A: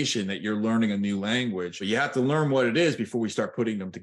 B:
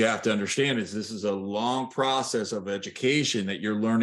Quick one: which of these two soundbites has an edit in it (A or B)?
A